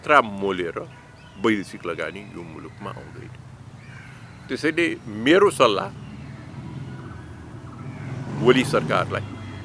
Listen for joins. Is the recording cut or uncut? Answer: uncut